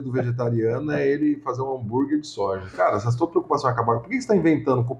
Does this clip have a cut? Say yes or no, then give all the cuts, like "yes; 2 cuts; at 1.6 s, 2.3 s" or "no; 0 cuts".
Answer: no; 0 cuts